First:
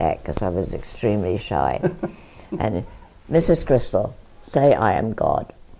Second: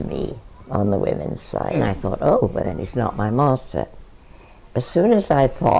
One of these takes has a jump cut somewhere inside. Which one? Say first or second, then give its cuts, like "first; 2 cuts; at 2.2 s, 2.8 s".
second; 1 cut; at 1.8 s